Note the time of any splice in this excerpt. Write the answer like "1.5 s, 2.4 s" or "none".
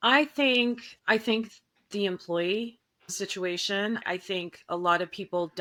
none